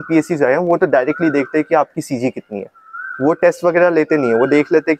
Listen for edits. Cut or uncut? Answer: uncut